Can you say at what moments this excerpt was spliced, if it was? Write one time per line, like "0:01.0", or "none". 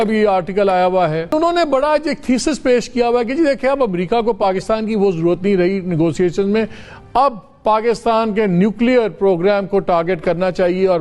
0:01.4